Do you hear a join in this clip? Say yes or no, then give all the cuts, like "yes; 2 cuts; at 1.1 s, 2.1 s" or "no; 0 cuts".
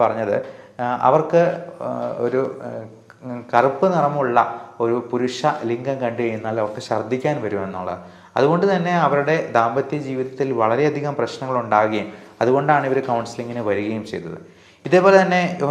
no; 0 cuts